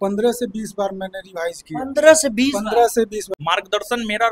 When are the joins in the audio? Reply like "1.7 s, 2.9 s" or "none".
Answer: 3.3 s